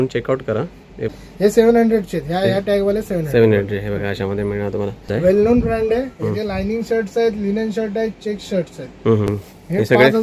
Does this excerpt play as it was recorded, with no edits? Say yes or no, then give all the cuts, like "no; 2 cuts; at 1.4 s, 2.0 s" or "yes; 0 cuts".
no; 3 cuts; at 1.1 s, 5.2 s, 9.3 s